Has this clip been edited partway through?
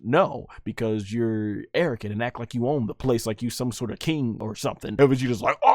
yes; 2 cuts; at 2.9 s, 4.8 s

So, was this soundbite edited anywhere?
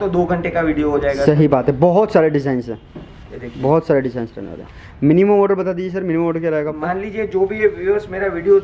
no; 0 cuts

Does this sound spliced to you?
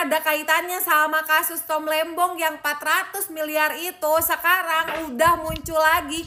no; 0 cuts

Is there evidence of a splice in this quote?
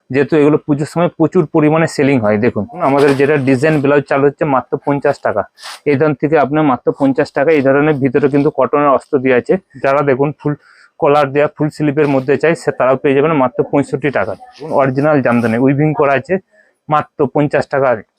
yes; 3 cuts; at 2.8 s, 9.7 s, 14.7 s

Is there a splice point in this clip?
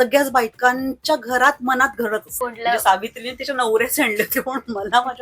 yes; 1 cut; at 2.3 s

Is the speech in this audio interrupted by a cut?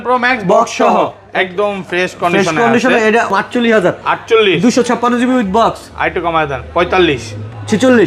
yes; 1 cut; at 3.3 s

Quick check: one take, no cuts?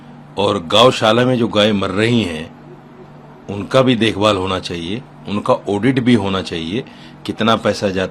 yes; 0 cuts

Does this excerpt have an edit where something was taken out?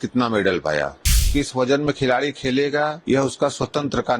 yes; 2 cuts; at 1.2 s, 3.0 s

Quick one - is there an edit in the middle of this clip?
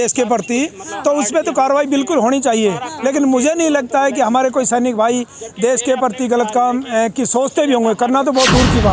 no; 0 cuts

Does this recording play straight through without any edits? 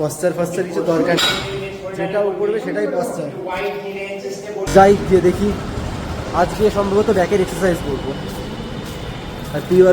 no; 1 cut; at 4.7 s

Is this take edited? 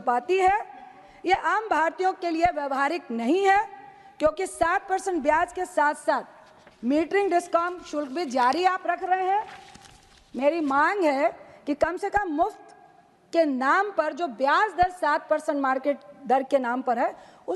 no; 0 cuts

